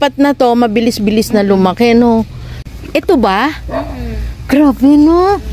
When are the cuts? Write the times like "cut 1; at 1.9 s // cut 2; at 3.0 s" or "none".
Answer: cut 1; at 2.7 s